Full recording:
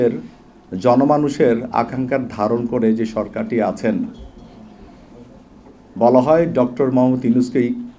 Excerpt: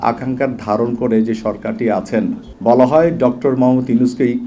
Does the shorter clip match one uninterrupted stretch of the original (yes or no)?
no